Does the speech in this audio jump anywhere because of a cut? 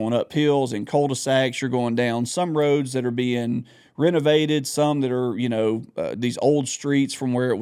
no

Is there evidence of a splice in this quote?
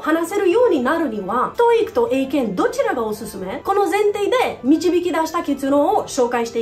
yes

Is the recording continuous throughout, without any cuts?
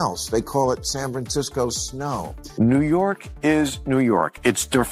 no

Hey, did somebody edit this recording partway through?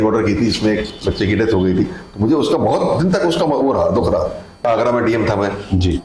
yes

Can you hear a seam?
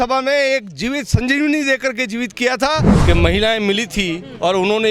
yes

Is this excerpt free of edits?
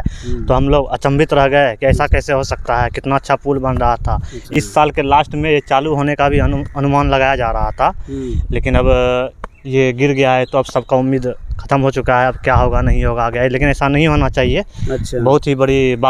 yes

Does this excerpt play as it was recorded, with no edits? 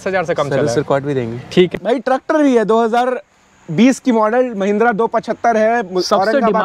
no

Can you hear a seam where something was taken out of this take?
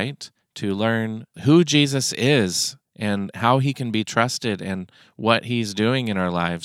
yes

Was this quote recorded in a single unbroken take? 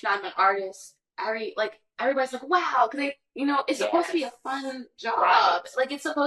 yes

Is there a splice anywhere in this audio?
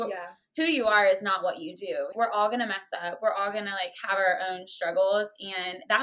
yes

